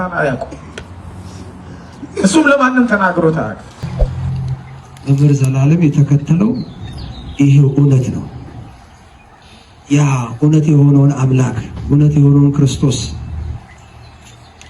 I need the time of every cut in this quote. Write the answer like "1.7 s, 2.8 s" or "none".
3.8 s